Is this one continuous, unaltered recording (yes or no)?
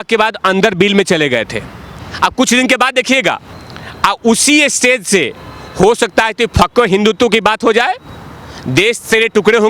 no